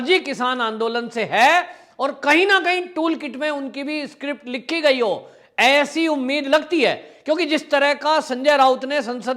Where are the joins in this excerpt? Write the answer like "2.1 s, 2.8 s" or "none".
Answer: none